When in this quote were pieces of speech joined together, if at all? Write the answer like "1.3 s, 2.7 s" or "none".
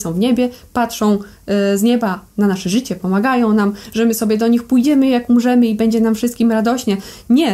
none